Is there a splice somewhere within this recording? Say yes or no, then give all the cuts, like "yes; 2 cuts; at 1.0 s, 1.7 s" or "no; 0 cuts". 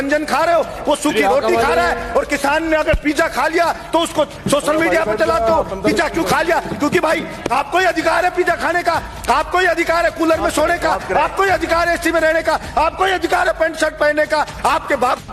no; 0 cuts